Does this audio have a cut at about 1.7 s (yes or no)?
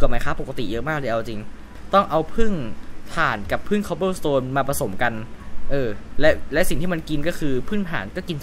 yes